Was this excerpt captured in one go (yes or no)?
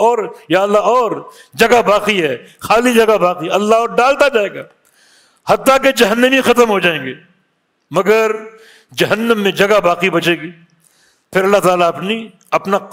yes